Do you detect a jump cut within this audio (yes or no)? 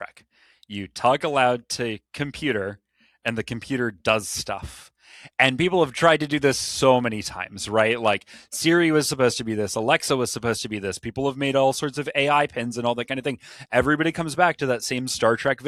no